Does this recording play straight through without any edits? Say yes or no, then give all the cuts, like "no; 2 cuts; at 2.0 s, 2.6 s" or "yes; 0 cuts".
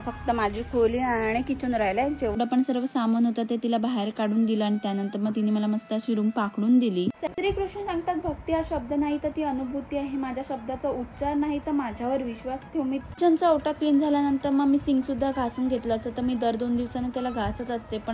no; 3 cuts; at 2.4 s, 7.3 s, 13.1 s